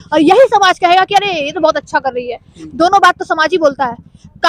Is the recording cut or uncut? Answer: uncut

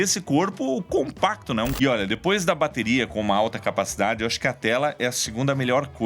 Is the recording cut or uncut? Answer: cut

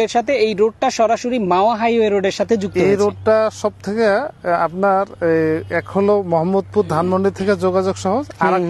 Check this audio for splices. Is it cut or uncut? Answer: uncut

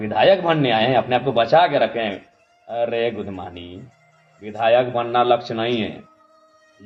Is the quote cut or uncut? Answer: uncut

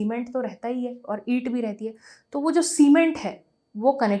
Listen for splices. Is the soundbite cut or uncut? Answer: uncut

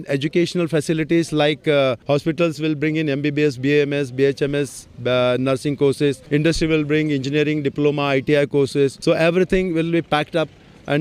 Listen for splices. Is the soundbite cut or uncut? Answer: cut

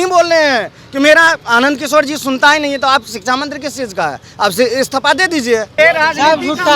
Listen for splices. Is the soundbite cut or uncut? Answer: cut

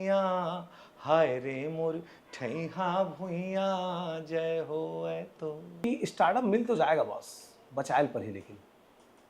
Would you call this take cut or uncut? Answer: cut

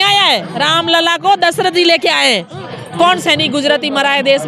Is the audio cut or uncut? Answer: cut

